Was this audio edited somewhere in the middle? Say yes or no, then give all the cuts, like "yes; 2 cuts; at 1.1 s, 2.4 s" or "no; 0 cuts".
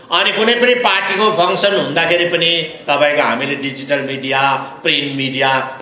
no; 0 cuts